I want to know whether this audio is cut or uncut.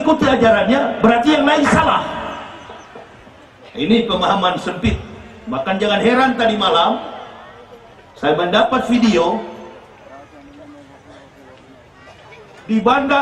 uncut